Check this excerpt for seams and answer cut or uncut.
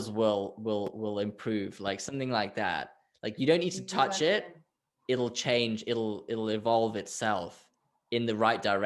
uncut